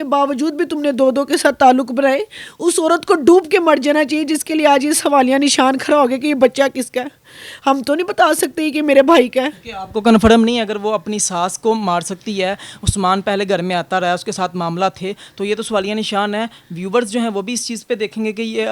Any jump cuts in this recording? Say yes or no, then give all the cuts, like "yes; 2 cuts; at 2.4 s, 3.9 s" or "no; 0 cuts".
no; 0 cuts